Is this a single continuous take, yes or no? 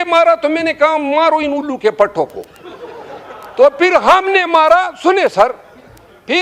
yes